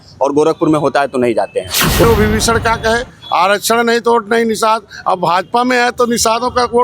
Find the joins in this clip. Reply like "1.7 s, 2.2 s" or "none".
2.0 s